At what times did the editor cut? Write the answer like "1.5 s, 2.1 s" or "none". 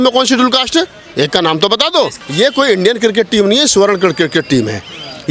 2.2 s